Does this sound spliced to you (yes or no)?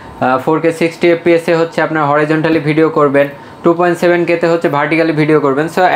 no